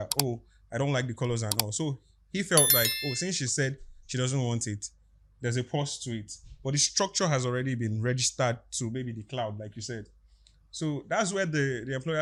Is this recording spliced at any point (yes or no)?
no